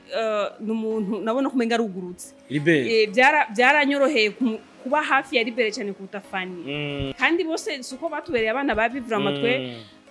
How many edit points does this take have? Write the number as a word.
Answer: one